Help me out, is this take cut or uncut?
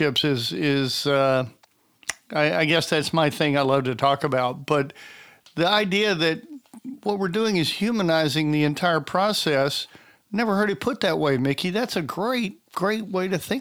uncut